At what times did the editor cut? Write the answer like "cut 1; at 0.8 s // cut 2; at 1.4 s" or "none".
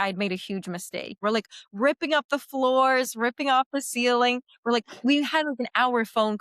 cut 1; at 1.2 s

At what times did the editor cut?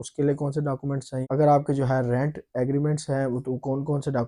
cut 1; at 1.3 s

